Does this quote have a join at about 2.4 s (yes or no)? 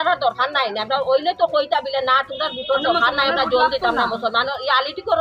no